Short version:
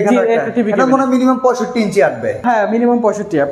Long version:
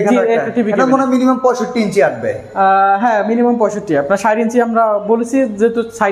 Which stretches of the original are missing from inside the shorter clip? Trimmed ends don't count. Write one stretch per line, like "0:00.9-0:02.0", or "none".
0:02.4-0:03.0